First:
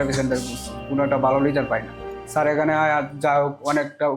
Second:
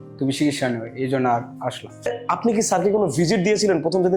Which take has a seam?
second; 1 cut; at 2.2 s

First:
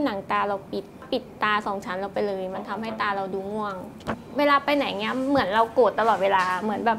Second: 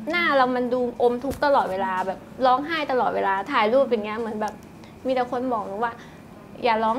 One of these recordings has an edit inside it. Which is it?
first; 2 cuts; at 1.1 s, 4.2 s

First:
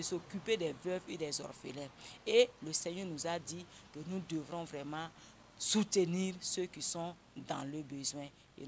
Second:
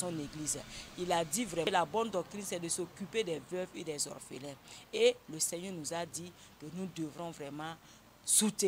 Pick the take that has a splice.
second; 1 cut; at 1.8 s

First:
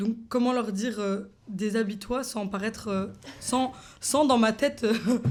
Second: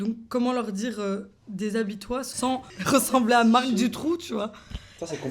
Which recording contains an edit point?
second; 1 cut; at 2.4 s

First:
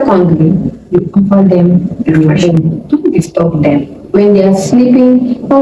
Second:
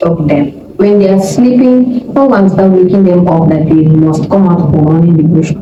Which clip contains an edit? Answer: first; 1 cut; at 2.2 s

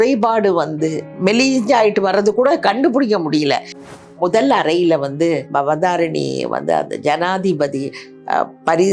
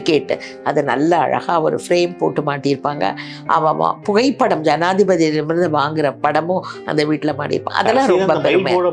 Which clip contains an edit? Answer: first; 2 cuts; at 1.1 s, 4.0 s

